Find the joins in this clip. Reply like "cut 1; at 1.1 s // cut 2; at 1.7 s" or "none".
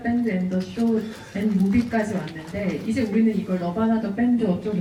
none